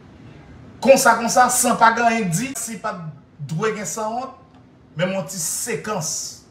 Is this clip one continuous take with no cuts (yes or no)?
no